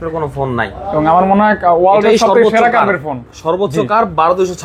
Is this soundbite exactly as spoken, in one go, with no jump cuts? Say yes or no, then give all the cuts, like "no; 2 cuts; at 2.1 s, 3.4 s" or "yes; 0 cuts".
yes; 0 cuts